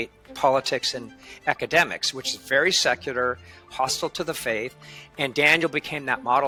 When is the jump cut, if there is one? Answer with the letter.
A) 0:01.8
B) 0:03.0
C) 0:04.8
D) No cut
D